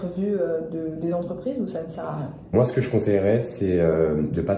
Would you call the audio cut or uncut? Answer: uncut